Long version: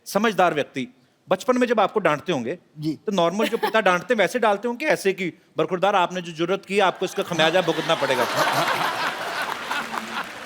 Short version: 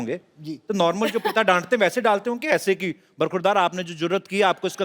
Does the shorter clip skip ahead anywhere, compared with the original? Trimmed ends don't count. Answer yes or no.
no